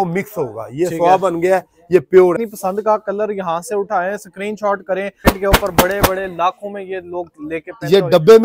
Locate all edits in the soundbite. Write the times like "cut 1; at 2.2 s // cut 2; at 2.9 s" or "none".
cut 1; at 2.5 s // cut 2; at 5.2 s